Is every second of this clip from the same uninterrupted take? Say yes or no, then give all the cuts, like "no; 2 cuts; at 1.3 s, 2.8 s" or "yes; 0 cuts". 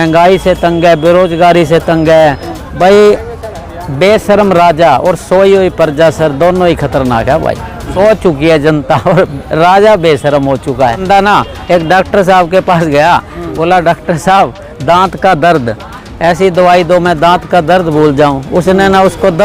no; 3 cuts; at 2.5 s, 7.8 s, 11.0 s